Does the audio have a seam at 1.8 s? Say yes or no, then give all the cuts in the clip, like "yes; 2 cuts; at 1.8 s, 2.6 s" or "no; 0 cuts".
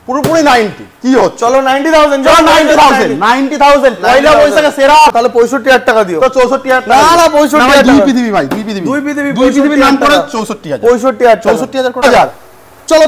no; 2 cuts; at 5.1 s, 12.0 s